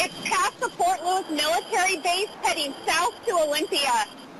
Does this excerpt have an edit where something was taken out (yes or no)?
no